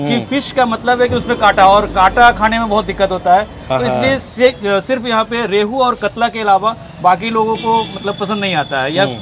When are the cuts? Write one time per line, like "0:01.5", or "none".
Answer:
none